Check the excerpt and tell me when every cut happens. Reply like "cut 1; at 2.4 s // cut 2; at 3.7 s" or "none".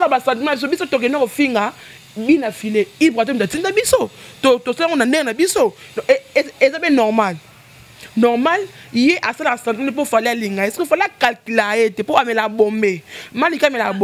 none